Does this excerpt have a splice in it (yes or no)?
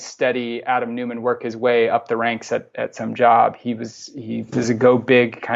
no